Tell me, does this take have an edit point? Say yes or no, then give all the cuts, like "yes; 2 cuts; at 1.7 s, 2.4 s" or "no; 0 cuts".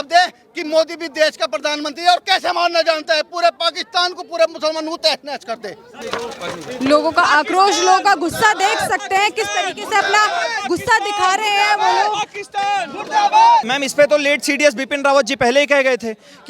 yes; 2 cuts; at 5.9 s, 13.7 s